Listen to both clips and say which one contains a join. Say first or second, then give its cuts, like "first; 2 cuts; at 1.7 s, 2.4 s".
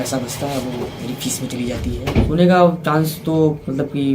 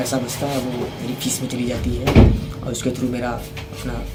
first; 1 cut; at 2.2 s